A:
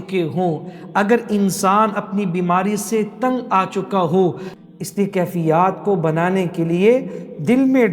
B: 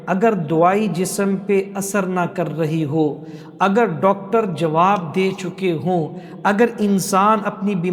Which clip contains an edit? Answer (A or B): A